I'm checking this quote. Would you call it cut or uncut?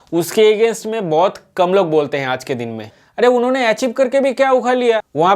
cut